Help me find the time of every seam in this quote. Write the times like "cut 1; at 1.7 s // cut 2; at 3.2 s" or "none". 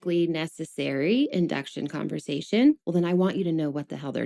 cut 1; at 2.8 s